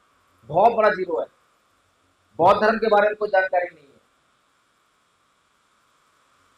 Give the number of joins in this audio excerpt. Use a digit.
0